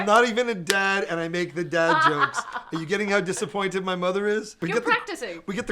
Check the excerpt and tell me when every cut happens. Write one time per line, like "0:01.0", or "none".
0:04.5